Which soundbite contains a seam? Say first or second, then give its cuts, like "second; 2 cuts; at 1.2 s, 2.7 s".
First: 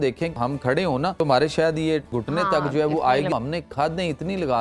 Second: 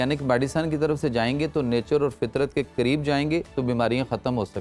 first; 3 cuts; at 0.8 s, 2.1 s, 3.3 s